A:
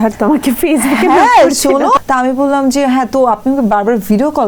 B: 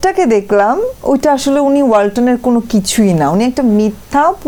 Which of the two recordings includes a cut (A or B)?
A